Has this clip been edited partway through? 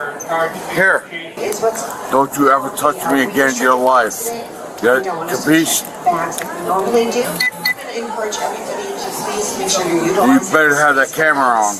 yes; 1 cut; at 1.6 s

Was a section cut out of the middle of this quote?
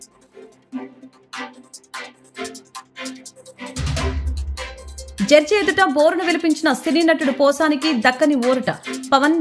yes; 1 cut; at 0.9 s

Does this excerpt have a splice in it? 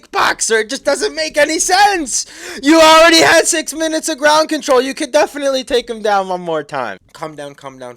yes; 1 cut; at 7.1 s

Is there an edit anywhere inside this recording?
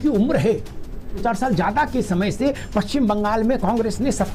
yes; 1 cut; at 1.2 s

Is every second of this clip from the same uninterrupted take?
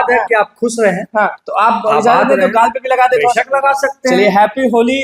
yes; 0 cuts

